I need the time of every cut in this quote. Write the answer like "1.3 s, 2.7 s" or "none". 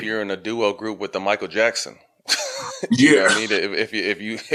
none